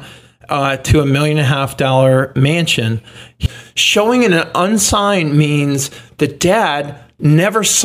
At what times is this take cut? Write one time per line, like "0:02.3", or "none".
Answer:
0:03.4

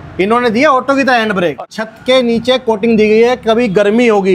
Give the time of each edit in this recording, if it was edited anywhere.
0:01.5

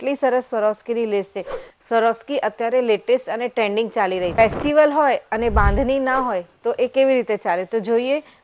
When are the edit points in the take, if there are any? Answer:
0:04.3

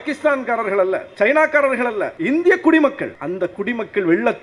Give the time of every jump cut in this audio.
0:01.1
0:02.1
0:03.1

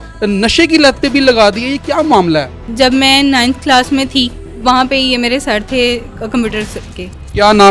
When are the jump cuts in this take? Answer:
0:02.7
0:04.5

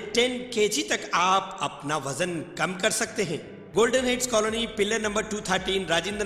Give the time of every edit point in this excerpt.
0:03.6

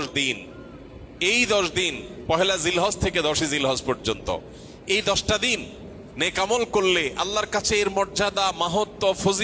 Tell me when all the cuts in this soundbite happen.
none

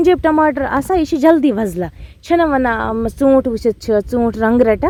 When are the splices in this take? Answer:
none

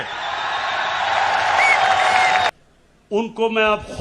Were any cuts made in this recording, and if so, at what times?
0:02.5

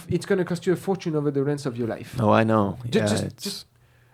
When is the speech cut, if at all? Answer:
none

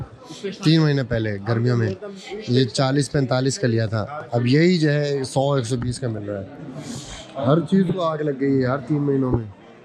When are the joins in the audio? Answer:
none

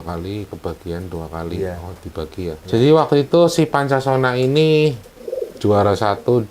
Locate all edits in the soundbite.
0:02.6

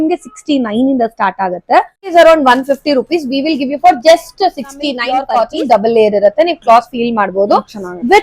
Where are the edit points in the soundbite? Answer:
0:02.1
0:05.1

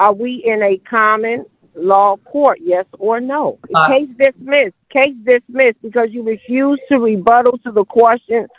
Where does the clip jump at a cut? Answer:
0:03.6
0:04.8

